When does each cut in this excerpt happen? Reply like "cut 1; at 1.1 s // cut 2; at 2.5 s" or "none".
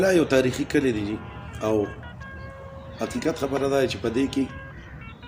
none